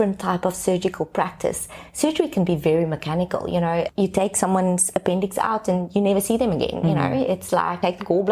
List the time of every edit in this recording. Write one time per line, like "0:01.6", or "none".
none